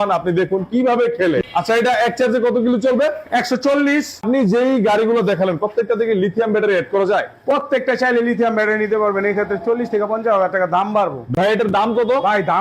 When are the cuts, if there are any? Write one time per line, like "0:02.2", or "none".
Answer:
0:01.4
0:04.2
0:11.3